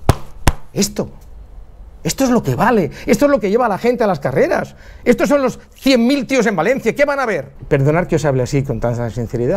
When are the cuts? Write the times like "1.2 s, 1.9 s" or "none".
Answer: 7.5 s